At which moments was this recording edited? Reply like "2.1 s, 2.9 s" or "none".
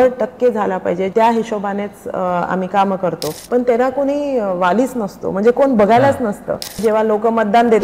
1.1 s, 3.3 s, 6.8 s